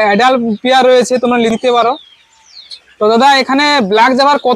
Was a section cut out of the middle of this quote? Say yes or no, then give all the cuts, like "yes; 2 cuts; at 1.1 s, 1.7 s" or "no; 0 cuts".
no; 0 cuts